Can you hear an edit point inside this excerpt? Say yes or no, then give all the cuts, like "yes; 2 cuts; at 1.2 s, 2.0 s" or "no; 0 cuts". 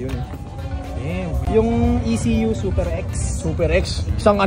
yes; 1 cut; at 1.4 s